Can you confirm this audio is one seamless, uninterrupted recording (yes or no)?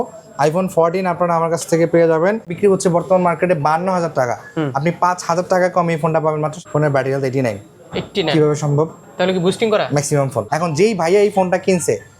no